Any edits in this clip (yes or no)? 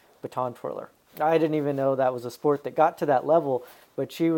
no